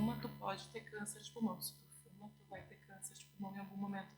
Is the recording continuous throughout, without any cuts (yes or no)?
yes